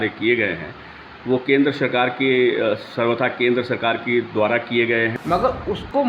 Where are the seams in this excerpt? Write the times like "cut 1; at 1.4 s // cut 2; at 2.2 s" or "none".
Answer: cut 1; at 5.1 s